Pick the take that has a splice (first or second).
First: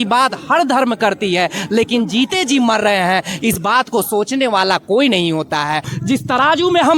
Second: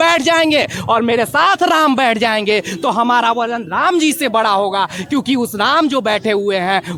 first